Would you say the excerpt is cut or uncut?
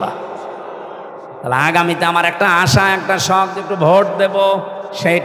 cut